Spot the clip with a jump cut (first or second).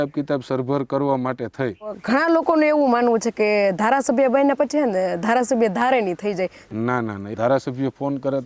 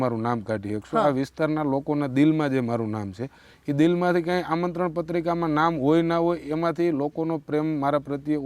first